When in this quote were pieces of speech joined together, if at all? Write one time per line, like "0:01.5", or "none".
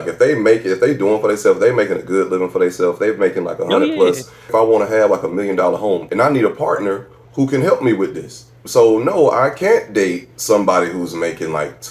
0:04.5
0:06.1
0:07.2
0:08.5

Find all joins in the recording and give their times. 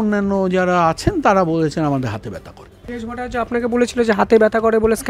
0:02.9

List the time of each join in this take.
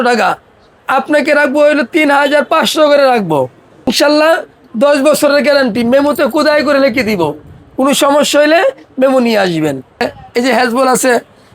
0:03.9
0:10.0

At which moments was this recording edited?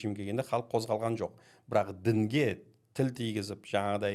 none

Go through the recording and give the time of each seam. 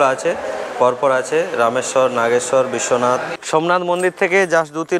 0:03.3

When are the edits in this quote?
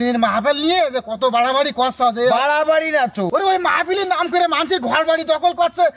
0:03.3

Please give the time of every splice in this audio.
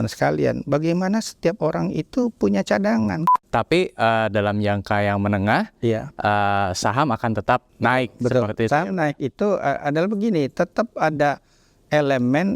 0:03.2
0:07.7

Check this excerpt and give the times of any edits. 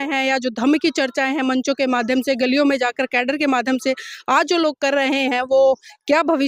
none

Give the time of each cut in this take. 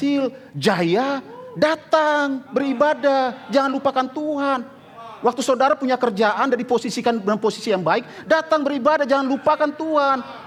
none

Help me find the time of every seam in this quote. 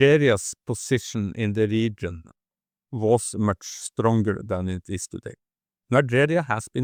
none

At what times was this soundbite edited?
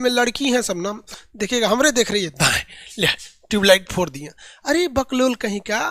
0:01.0

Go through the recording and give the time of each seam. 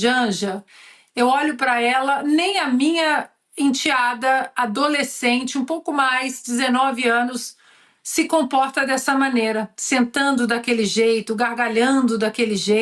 none

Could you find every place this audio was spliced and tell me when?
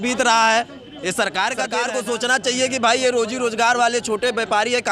0:01.8

